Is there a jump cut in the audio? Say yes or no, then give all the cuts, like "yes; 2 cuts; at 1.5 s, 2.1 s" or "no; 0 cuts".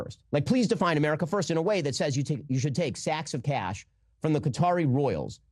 no; 0 cuts